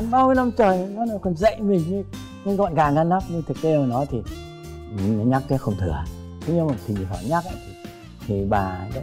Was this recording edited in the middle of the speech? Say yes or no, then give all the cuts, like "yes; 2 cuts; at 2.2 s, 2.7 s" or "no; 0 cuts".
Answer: no; 0 cuts